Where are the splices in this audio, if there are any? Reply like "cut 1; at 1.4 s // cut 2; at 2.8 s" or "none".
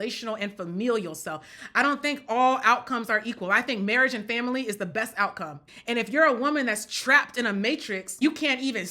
cut 1; at 1.5 s // cut 2; at 5.6 s // cut 3; at 8.2 s